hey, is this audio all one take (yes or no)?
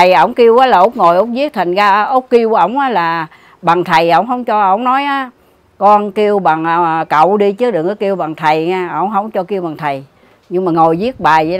yes